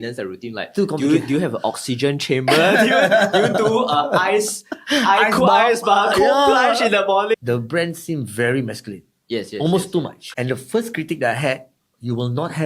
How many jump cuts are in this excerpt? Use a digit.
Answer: 2